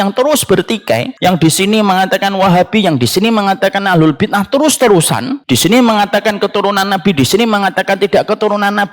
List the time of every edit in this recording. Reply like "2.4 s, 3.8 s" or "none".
1.1 s, 5.3 s